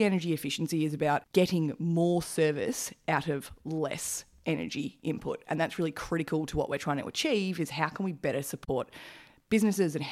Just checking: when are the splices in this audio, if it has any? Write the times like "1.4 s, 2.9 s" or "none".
1.3 s